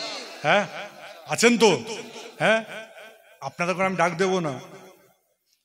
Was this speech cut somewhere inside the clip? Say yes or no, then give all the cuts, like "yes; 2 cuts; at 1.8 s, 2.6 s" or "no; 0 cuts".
no; 0 cuts